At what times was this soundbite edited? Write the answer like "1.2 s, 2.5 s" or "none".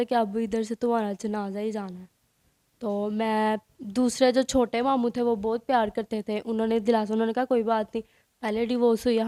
none